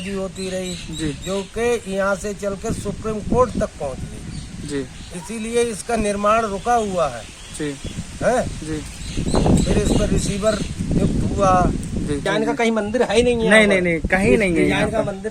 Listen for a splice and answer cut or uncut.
cut